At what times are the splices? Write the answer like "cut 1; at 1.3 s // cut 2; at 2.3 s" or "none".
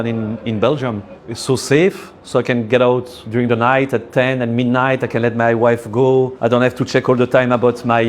cut 1; at 1.1 s // cut 2; at 3.2 s // cut 3; at 6.3 s

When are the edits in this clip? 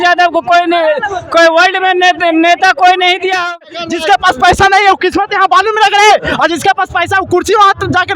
cut 1; at 3.6 s

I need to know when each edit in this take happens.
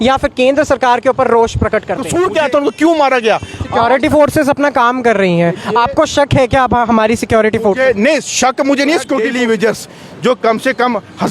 cut 1; at 2.0 s // cut 2; at 9.2 s

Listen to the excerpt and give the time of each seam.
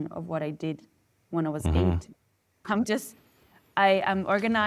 cut 1; at 2.6 s

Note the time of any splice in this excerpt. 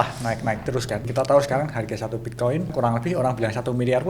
cut 1; at 1.1 s // cut 2; at 2.7 s

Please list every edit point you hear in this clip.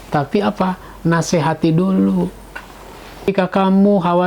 cut 1; at 3.3 s

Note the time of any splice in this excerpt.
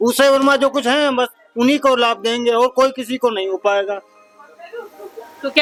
none

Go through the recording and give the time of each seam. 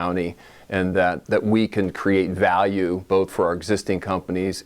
cut 1; at 1.2 s

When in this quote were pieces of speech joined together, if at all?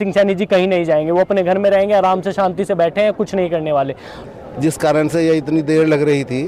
none

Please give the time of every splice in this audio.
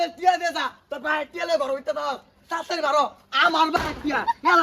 none

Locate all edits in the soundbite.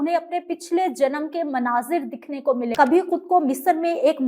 cut 1; at 2.7 s

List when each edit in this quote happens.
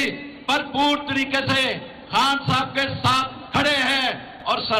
none

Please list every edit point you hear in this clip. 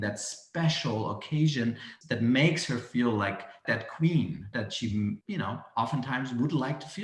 cut 1; at 1.9 s // cut 2; at 3.6 s // cut 3; at 4.5 s // cut 4; at 5.2 s

